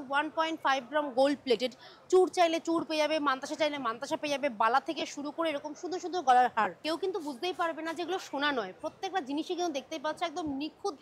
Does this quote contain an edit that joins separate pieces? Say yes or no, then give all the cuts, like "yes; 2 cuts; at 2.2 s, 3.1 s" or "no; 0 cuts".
no; 0 cuts